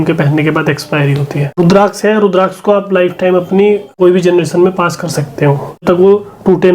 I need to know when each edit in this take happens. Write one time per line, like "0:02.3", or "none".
0:01.6
0:03.9
0:05.8